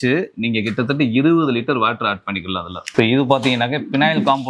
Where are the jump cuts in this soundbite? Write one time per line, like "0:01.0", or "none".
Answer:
0:02.8